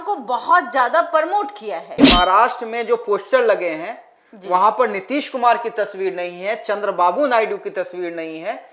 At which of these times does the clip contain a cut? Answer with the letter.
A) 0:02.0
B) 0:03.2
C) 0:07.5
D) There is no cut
A